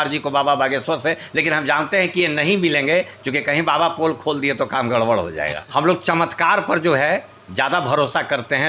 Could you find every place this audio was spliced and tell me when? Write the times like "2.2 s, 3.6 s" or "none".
5.6 s